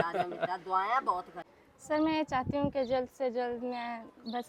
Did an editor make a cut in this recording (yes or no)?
yes